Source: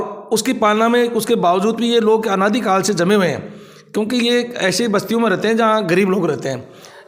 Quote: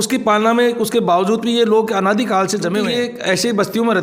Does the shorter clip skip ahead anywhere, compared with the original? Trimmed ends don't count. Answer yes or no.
yes